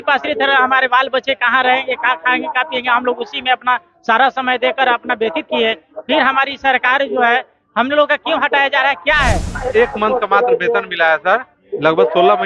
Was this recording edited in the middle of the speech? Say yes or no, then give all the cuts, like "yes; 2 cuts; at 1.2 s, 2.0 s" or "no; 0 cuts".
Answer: yes; 1 cut; at 9.6 s